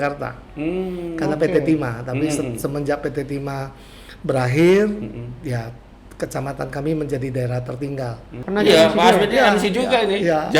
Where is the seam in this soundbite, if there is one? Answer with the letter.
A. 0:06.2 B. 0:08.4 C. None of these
B